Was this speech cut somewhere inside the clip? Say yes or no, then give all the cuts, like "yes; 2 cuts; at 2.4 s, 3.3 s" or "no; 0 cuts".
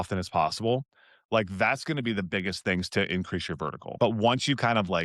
yes; 1 cut; at 3.8 s